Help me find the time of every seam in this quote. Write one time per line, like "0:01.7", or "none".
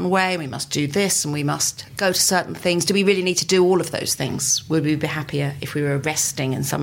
0:01.8